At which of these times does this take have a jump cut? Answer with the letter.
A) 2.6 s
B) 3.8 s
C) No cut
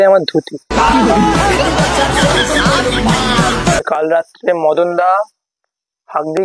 B